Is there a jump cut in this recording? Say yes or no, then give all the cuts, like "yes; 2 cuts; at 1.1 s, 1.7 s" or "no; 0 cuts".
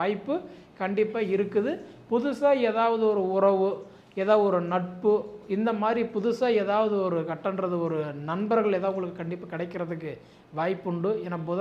no; 0 cuts